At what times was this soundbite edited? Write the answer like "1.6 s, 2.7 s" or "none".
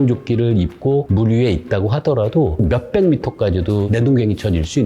2.6 s, 3.9 s